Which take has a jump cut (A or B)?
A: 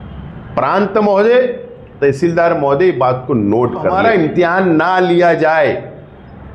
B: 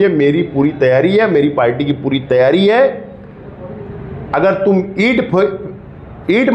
A